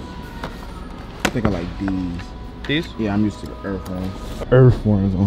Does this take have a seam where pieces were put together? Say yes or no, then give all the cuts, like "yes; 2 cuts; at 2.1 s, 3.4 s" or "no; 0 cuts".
yes; 1 cut; at 4.3 s